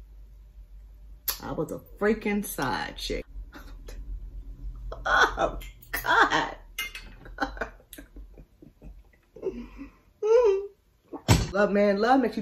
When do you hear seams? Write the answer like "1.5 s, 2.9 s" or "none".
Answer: 3.2 s, 11.6 s